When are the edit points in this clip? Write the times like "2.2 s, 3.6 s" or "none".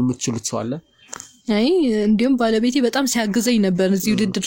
none